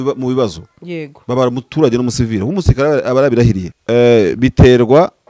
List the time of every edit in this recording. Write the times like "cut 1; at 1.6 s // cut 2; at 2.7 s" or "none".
cut 1; at 3.7 s